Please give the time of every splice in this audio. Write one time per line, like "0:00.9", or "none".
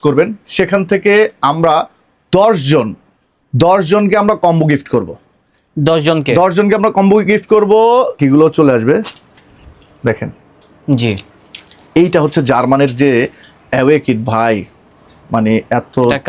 0:08.1

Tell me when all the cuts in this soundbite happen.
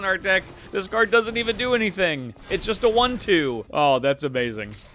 0:03.6

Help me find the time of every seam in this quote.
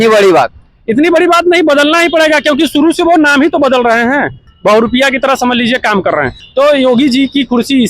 0:04.4
0:06.4

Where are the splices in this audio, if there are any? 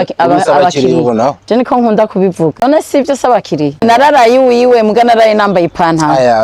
0:02.6
0:03.8

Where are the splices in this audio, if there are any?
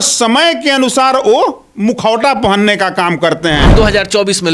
0:01.6
0:03.7

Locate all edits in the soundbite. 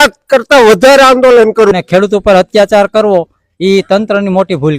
0:01.7

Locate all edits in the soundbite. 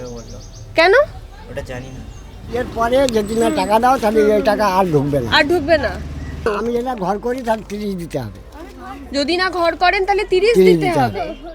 0:02.5
0:06.5

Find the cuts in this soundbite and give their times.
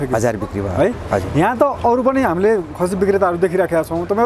none

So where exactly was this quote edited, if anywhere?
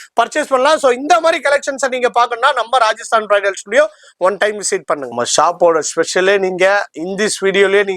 none

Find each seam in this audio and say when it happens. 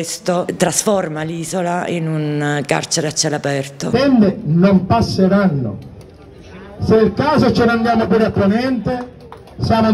0:03.9

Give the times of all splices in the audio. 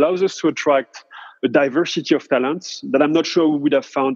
0:01.3

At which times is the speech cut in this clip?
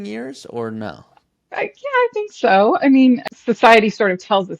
0:03.2

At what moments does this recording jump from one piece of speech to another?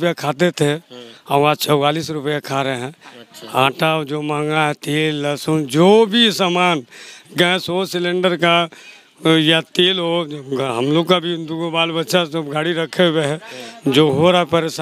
none

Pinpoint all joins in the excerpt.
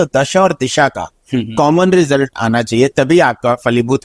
none

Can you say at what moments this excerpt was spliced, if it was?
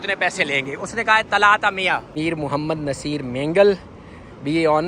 0:02.1

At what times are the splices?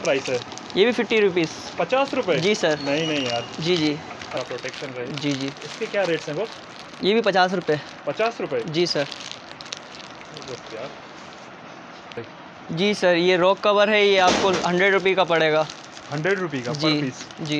0:04.4
0:12.2

